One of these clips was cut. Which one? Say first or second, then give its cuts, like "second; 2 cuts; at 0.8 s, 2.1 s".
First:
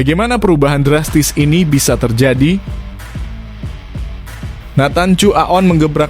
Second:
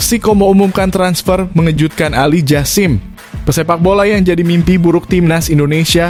first; 2 cuts; at 2.8 s, 4.7 s